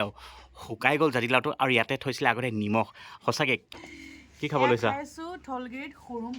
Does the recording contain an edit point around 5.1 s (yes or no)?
no